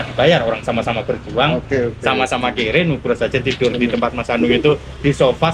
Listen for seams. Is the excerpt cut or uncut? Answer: uncut